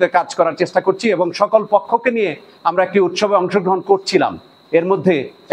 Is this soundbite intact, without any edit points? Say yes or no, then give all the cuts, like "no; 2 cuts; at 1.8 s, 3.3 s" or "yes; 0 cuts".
yes; 0 cuts